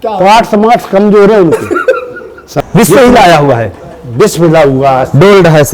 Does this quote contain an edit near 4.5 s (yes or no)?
no